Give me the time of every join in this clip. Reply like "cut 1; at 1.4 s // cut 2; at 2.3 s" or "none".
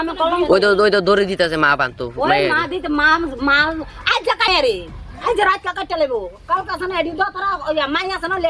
cut 1; at 4.5 s